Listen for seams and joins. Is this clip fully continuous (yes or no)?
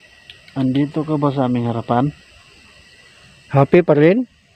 yes